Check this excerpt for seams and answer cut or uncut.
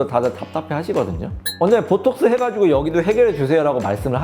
cut